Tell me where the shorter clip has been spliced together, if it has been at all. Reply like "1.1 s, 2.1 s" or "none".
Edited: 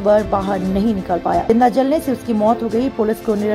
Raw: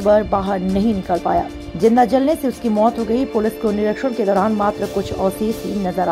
1.4 s